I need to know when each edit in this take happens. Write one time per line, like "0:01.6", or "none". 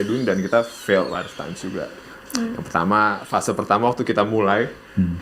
none